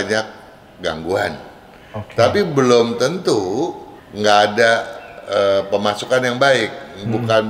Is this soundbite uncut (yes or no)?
yes